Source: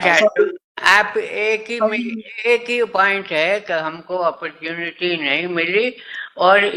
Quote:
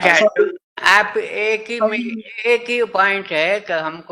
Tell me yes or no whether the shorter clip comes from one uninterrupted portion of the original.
yes